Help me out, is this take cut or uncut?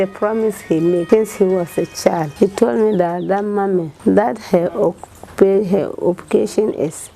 cut